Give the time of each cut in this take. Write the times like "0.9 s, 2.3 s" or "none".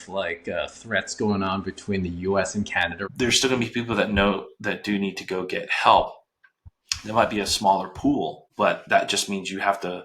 3.0 s, 8.4 s

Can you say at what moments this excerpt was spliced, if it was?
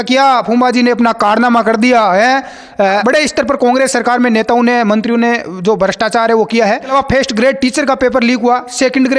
3.0 s, 6.9 s

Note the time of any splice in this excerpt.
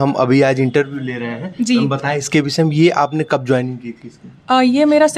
none

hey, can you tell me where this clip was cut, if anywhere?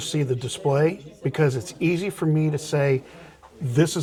none

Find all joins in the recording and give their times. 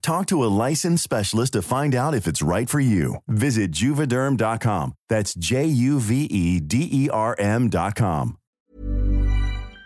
8.5 s

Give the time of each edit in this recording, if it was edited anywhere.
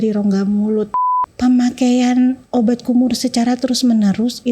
1.1 s

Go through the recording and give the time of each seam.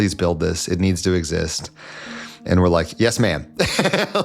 none

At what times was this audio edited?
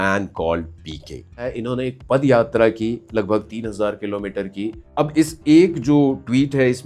1.5 s, 4.8 s

